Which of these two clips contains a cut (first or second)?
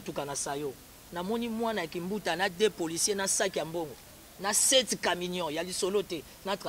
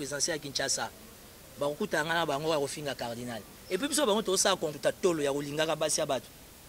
second